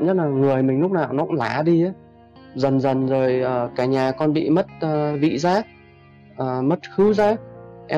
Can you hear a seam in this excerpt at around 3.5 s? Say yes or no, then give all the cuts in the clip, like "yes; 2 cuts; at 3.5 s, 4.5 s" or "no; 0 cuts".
no; 0 cuts